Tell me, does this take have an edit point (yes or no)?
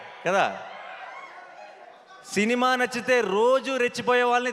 no